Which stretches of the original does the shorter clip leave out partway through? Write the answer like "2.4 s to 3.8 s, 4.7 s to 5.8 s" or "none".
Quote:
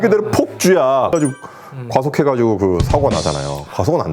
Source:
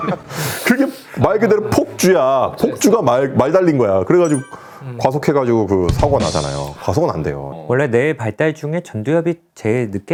2.5 s to 4.2 s